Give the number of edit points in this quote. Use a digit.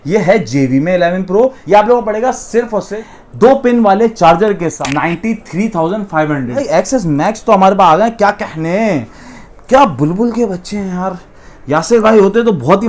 4